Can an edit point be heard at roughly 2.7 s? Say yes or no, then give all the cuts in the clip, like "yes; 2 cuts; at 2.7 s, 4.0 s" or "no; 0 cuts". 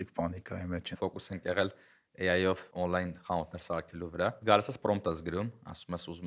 yes; 3 cuts; at 0.9 s, 2.7 s, 4.4 s